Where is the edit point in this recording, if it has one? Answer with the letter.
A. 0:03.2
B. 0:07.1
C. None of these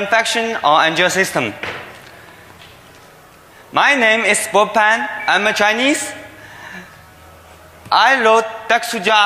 B